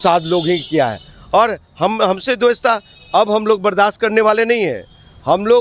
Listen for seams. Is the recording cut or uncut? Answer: uncut